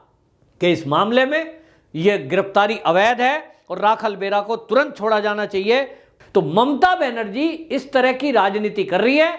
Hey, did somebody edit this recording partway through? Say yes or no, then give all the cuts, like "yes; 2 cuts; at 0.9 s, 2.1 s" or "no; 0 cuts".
yes; 1 cut; at 6.1 s